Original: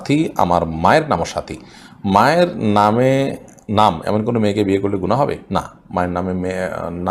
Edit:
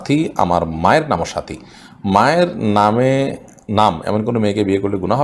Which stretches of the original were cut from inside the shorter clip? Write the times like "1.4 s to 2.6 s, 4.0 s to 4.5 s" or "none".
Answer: none